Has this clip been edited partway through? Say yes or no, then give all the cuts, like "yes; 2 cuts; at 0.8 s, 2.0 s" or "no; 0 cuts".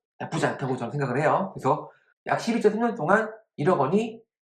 yes; 1 cut; at 1.8 s